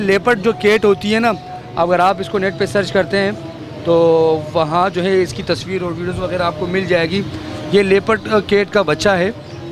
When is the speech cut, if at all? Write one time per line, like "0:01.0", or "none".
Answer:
none